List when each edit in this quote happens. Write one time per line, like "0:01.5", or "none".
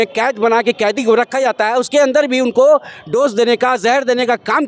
none